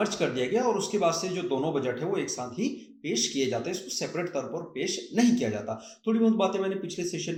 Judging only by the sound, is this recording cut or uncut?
uncut